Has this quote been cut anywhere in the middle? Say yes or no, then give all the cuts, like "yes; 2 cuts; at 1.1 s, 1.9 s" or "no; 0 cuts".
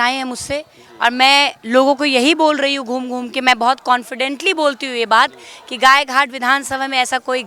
no; 0 cuts